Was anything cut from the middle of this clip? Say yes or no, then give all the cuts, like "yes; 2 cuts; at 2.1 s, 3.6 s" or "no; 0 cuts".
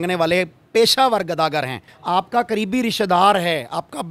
yes; 1 cut; at 1.9 s